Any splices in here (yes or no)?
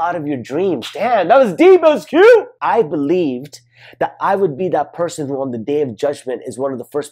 yes